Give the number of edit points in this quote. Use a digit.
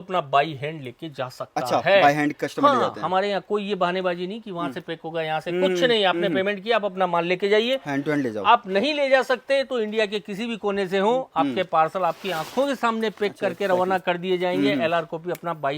0